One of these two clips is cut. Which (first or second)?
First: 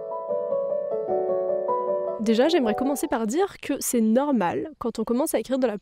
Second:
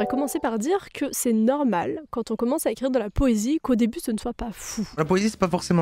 second